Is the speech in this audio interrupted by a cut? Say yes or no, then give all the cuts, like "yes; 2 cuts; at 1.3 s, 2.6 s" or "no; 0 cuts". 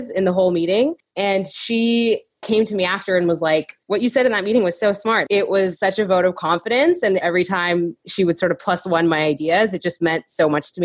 yes; 2 cuts; at 5.6 s, 7.2 s